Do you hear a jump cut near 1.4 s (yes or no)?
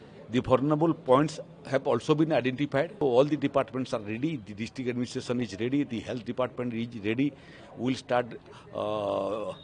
no